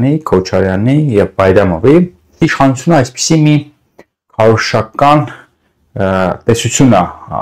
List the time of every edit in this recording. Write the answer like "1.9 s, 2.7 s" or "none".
2.4 s